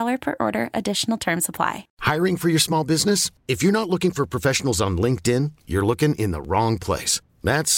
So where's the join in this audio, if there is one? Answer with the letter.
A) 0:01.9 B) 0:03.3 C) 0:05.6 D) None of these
A